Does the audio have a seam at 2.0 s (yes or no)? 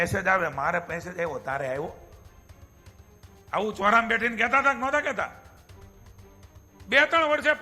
no